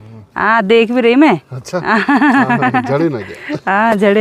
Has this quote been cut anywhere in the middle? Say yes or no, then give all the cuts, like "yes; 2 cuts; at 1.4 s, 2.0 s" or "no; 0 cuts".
no; 0 cuts